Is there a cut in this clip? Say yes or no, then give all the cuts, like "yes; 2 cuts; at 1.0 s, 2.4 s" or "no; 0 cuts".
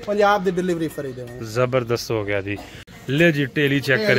yes; 1 cut; at 2.8 s